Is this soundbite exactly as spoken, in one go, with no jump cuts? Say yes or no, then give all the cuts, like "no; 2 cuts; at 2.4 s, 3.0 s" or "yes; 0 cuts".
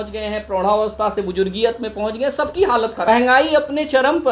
no; 1 cut; at 3.1 s